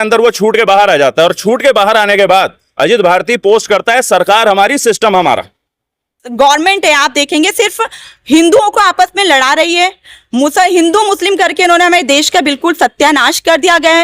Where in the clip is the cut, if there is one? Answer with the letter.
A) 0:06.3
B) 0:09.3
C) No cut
A